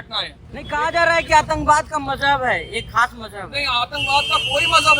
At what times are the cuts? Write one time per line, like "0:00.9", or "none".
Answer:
0:00.9